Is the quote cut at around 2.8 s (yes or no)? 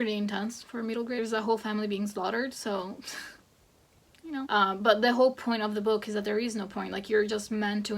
no